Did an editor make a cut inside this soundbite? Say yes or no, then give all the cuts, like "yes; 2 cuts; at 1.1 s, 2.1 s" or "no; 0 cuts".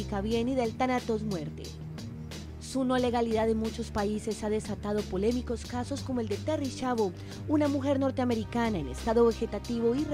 yes; 1 cut; at 6.5 s